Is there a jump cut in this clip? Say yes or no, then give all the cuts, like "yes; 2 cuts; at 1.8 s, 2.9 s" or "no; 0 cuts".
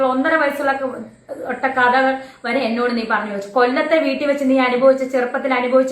no; 0 cuts